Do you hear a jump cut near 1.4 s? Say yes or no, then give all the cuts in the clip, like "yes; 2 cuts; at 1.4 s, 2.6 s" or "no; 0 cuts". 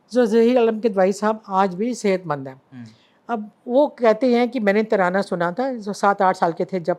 no; 0 cuts